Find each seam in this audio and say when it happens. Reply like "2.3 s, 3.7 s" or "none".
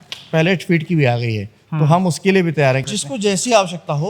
3.0 s